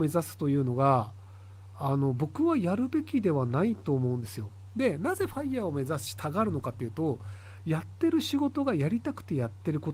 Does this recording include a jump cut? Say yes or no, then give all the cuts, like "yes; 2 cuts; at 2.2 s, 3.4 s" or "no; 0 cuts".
no; 0 cuts